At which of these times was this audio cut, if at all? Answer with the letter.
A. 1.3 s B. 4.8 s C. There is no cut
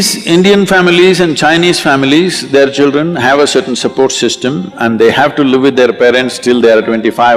C